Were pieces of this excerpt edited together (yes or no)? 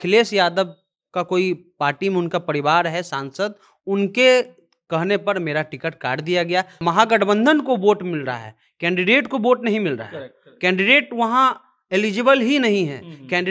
yes